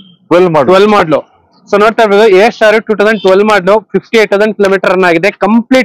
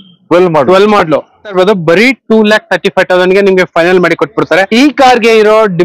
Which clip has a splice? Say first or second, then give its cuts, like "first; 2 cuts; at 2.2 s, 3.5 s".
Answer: second; 2 cuts; at 1.5 s, 4.7 s